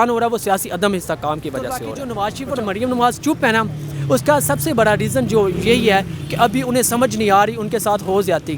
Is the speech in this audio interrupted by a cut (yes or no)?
yes